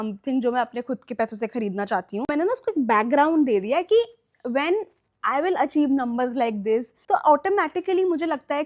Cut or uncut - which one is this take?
cut